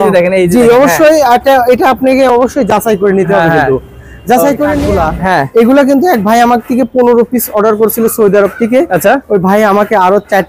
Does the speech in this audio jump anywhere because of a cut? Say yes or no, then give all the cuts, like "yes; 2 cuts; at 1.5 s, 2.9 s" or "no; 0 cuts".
yes; 1 cut; at 4.8 s